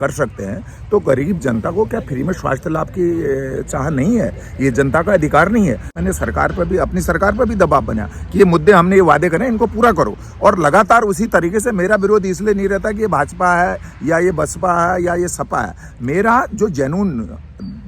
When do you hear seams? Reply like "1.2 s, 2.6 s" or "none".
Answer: 5.9 s